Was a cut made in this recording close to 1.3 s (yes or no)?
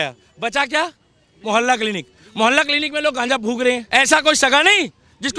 no